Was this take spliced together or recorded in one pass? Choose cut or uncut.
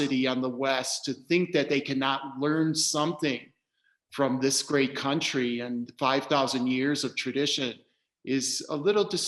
uncut